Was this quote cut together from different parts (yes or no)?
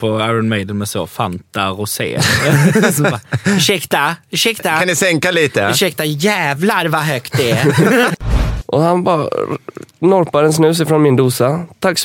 yes